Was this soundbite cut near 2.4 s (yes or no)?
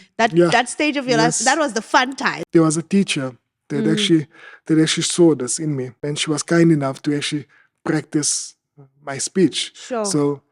yes